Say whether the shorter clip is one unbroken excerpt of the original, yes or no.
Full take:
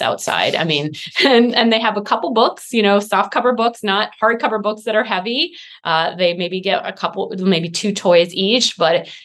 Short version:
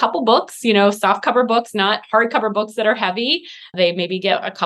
no